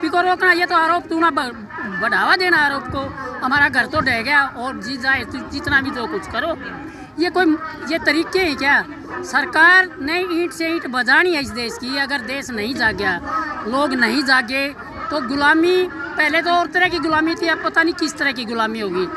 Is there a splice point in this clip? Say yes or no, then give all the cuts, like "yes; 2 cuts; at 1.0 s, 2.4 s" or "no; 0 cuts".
no; 0 cuts